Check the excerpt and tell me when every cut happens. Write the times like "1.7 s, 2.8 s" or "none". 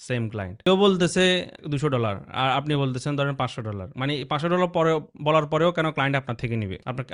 none